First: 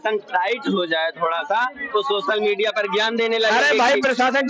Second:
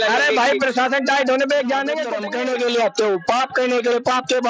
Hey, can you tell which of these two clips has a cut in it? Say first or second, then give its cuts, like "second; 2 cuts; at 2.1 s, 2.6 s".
second; 1 cut; at 2.2 s